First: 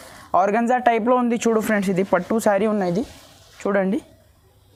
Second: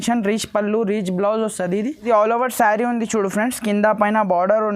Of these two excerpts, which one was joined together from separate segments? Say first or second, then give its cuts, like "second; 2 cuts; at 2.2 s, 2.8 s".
second; 1 cut; at 2.0 s